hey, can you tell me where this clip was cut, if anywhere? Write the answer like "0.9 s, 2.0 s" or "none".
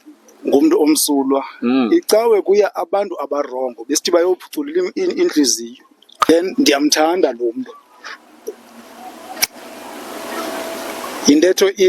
6.2 s

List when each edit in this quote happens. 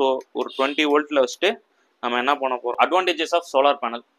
2.9 s

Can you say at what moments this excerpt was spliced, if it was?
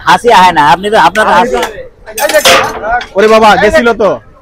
1.5 s

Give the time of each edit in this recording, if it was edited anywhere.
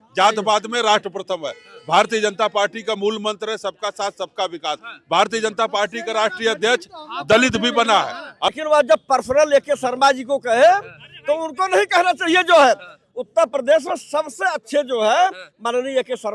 8.6 s

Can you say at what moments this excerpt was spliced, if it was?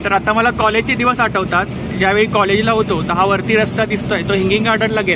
none

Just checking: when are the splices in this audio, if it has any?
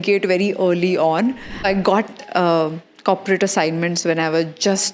1.6 s

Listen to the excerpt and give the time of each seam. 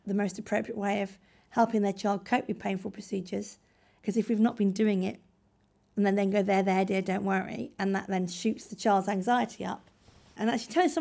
4.0 s, 9.8 s

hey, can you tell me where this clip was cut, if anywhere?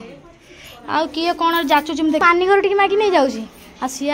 2.2 s

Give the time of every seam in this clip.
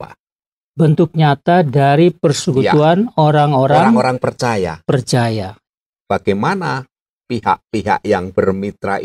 5.6 s

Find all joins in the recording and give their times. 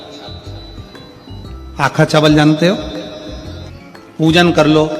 3.6 s

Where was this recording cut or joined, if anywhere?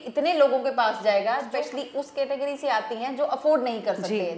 1.5 s

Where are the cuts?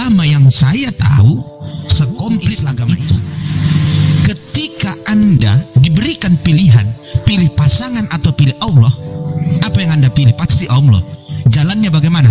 2.7 s

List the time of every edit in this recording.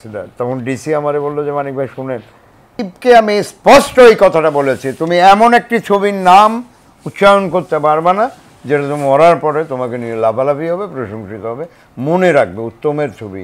2.8 s

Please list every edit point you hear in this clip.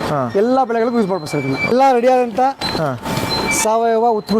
1.7 s

